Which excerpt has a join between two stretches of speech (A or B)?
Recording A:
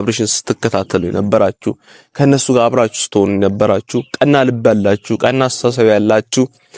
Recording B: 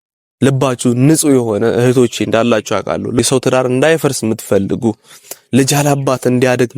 B